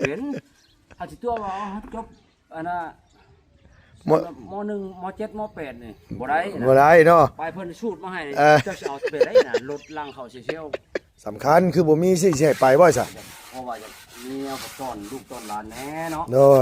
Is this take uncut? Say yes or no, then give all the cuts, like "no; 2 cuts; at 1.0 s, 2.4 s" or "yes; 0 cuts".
no; 1 cut; at 10.9 s